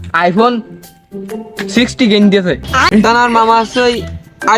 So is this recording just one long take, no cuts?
no; 1 cut; at 2.9 s

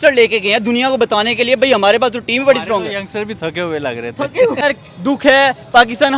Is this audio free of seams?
no; 1 cut; at 4.6 s

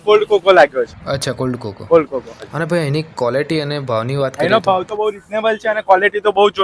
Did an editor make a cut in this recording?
no; 0 cuts

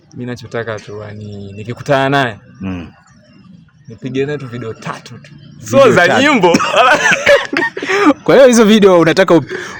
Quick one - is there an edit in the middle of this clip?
no; 0 cuts

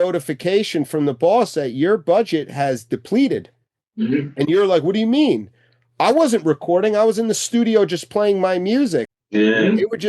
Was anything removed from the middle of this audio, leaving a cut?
yes; 1 cut; at 9.2 s

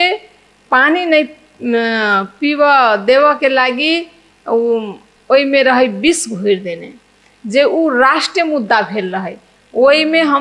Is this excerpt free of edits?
yes; 0 cuts

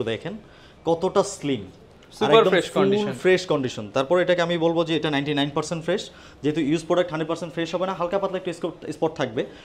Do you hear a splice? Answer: no; 0 cuts

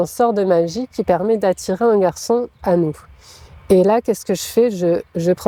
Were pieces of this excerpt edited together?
no; 0 cuts

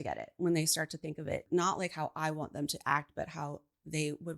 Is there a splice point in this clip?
yes; 1 cut; at 1.4 s

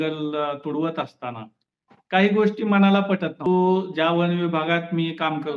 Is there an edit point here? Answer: yes; 1 cut; at 3.5 s

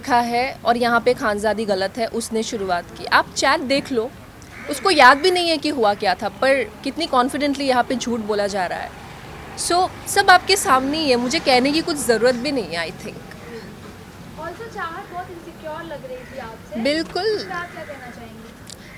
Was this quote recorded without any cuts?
yes; 0 cuts

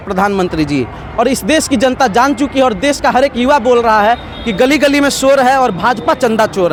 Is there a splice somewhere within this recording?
no; 0 cuts

